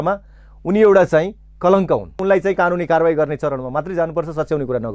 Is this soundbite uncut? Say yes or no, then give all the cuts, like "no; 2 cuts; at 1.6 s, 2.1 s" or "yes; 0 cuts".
no; 1 cut; at 2.2 s